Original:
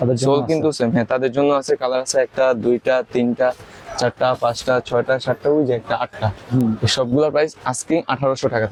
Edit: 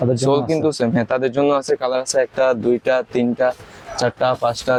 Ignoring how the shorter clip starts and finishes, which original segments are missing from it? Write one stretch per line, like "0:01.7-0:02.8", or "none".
none